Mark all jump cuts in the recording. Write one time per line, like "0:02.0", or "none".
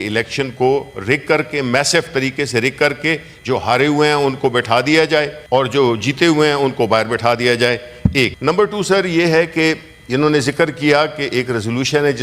0:05.4
0:08.4